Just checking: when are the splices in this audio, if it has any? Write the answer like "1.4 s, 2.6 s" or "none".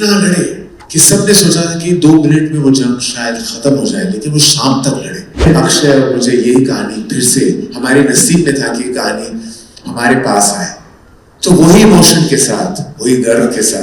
5.5 s